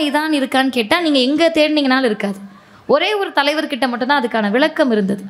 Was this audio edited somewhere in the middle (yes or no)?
no